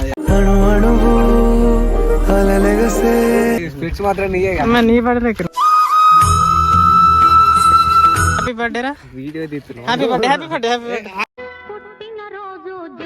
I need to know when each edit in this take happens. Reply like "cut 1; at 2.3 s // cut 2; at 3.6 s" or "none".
cut 1; at 3.6 s // cut 2; at 8.1 s